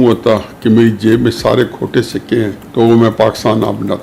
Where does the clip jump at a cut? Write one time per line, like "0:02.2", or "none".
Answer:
0:02.6